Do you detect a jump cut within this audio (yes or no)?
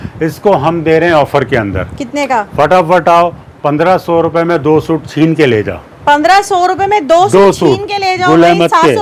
no